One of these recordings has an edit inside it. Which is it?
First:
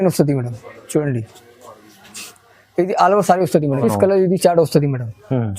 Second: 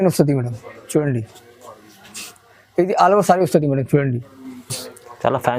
first; 1 cut; at 3.8 s

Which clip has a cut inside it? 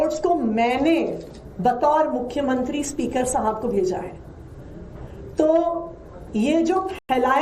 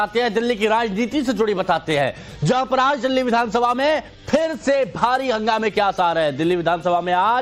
second; 1 cut; at 4.6 s

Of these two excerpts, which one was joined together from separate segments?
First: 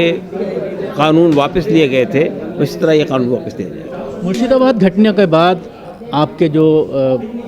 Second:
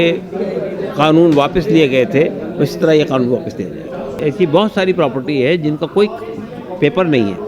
second; 1 cut; at 4.2 s

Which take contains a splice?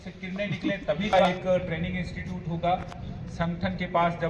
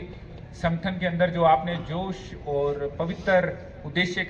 first; 1 cut; at 1.1 s

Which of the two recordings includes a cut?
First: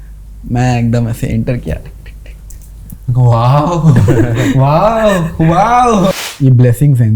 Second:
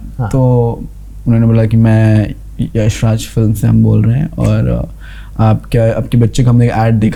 first; 1 cut; at 6.1 s

